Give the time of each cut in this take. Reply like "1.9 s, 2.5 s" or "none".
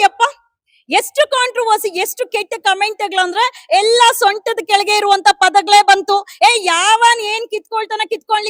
none